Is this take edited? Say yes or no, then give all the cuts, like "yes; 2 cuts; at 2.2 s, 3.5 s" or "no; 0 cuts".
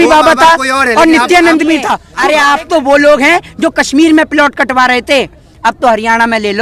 yes; 1 cut; at 2.0 s